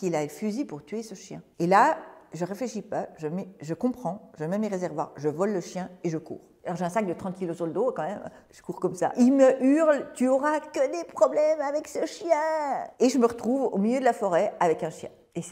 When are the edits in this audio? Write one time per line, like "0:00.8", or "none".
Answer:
none